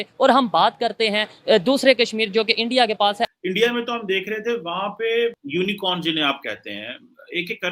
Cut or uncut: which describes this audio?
cut